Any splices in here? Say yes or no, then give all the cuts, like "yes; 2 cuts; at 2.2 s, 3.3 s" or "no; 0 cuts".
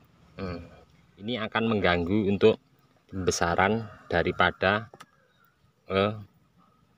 yes; 1 cut; at 1.3 s